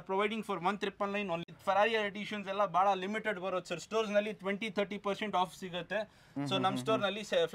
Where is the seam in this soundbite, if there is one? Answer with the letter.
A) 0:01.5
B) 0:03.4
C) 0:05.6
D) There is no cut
A